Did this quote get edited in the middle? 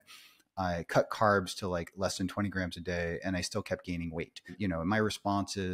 yes; 1 cut; at 4.6 s

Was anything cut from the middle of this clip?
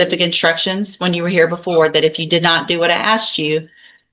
no; 0 cuts

